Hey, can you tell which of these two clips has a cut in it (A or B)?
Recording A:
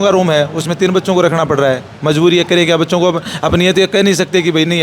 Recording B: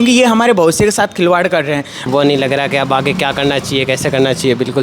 B